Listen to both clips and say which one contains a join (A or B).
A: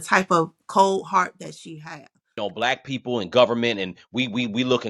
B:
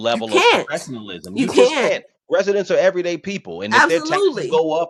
A